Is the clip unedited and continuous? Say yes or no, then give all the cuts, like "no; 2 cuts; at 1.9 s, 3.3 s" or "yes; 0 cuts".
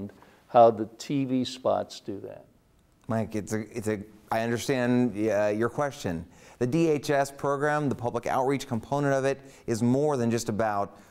yes; 0 cuts